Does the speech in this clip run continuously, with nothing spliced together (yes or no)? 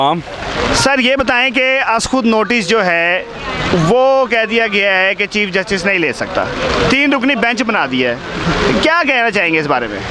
yes